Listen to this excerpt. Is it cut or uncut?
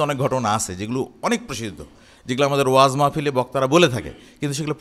uncut